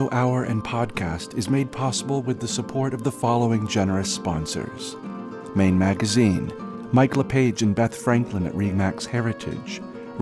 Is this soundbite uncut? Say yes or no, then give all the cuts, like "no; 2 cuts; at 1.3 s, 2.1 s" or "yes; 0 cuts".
yes; 0 cuts